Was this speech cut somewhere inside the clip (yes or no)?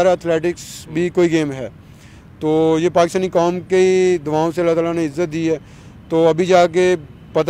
no